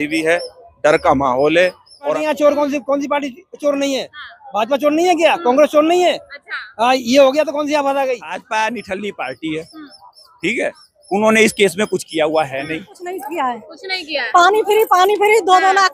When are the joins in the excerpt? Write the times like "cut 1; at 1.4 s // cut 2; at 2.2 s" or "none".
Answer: cut 1; at 2.1 s // cut 2; at 8.3 s // cut 3; at 13.0 s